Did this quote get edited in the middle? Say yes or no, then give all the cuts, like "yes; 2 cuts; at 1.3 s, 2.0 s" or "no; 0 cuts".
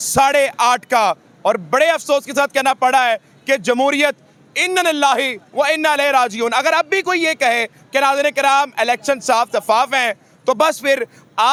no; 0 cuts